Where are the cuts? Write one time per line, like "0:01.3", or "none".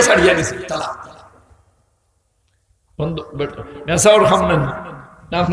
none